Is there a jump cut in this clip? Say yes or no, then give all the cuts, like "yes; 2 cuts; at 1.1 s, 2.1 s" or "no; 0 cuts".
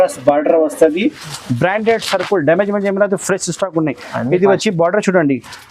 yes; 1 cut; at 1.3 s